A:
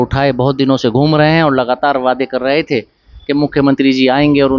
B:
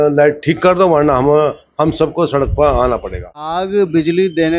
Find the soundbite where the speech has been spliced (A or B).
B